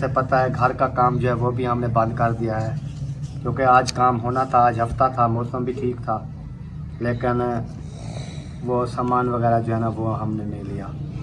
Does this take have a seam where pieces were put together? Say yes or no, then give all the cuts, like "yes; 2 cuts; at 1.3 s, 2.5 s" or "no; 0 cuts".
no; 0 cuts